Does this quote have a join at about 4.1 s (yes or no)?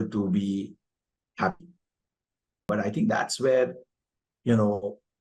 no